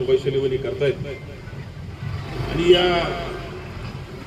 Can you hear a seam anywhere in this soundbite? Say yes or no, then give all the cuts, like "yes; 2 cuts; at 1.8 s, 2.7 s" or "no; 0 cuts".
no; 0 cuts